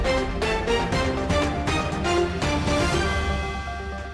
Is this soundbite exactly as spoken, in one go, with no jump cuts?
yes; 0 cuts

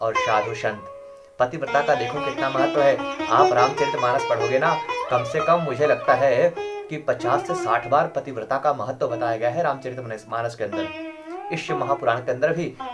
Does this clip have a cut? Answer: no; 0 cuts

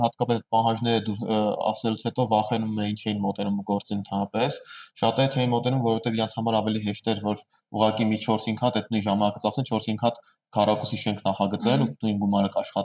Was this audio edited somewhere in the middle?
no; 0 cuts

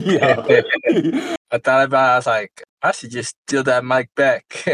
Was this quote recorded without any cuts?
no; 1 cut; at 1.4 s

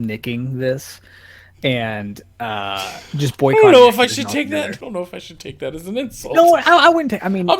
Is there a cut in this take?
yes; 1 cut; at 4.8 s

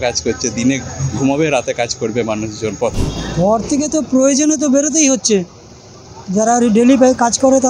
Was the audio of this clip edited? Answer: yes; 1 cut; at 3.0 s

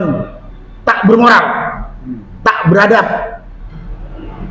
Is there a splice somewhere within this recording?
no; 0 cuts

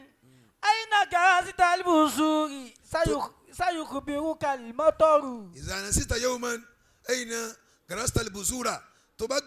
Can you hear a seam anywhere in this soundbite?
no; 0 cuts

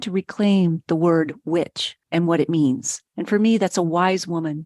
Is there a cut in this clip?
no; 0 cuts

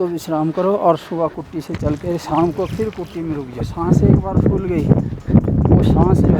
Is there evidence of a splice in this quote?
yes; 1 cut; at 3.7 s

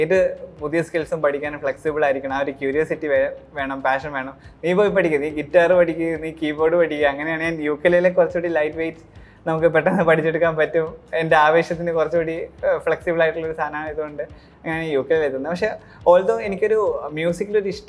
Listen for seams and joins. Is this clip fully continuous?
yes; 0 cuts

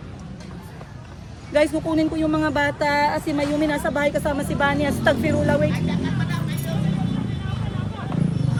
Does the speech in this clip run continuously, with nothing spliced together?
yes; 0 cuts

